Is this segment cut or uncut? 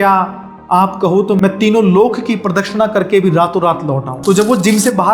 cut